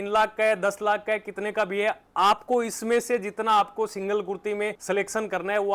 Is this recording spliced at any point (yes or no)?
no